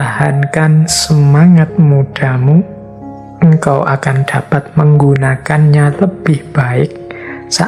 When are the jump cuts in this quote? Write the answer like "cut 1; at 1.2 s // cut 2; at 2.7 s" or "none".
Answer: none